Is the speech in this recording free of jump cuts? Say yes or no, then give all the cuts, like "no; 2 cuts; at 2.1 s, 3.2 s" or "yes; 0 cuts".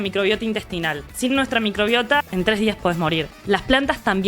no; 3 cuts; at 1.0 s, 2.2 s, 3.3 s